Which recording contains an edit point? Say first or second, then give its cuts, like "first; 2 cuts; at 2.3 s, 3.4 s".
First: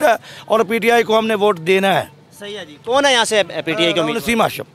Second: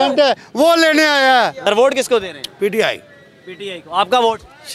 second; 1 cut; at 1.6 s